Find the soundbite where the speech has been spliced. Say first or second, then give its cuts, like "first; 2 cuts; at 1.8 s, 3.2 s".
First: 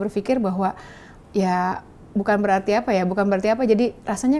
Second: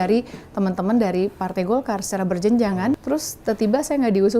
second; 1 cut; at 2.9 s